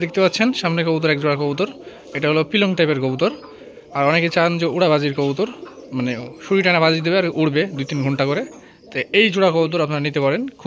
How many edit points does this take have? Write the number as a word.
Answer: zero